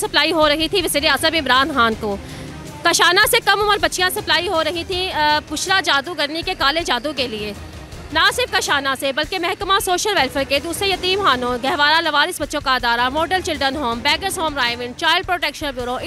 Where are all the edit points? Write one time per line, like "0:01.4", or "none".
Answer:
none